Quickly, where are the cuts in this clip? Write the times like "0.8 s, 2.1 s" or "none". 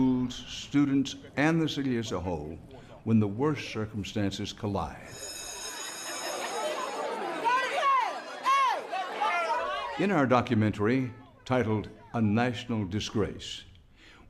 6.8 s

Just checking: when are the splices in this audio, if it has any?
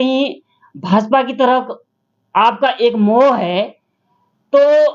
none

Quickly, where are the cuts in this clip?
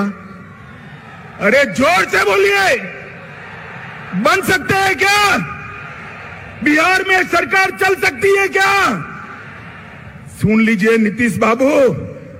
none

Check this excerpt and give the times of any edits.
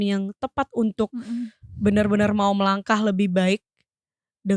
none

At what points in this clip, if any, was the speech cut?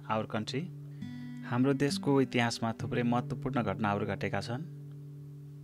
4.7 s

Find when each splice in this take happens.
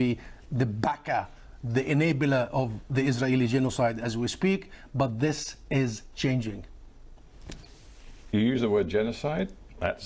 none

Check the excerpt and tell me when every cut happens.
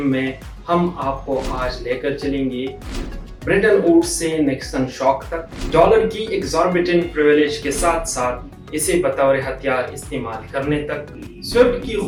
none

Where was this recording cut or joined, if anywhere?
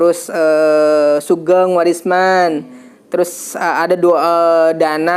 none

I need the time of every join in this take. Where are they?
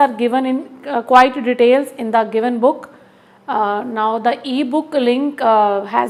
none

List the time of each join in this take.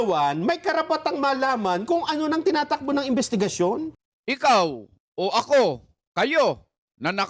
3.9 s

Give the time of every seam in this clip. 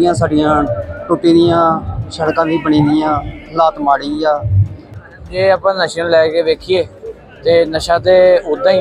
4.8 s

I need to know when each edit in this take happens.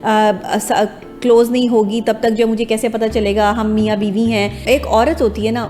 4.6 s

